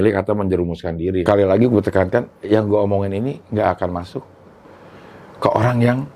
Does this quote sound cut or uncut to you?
cut